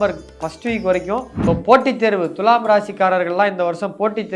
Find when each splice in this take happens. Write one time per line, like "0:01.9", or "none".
0:01.3